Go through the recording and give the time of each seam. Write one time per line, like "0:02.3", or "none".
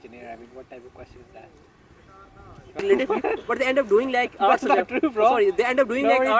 0:02.8